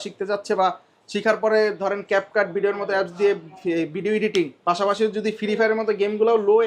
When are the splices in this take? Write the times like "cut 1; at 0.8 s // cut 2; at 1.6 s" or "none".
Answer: none